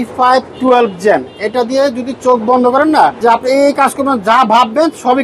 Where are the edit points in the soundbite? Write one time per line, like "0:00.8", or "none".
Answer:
0:03.2